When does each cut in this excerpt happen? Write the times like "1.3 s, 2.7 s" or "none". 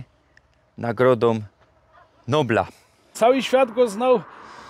3.1 s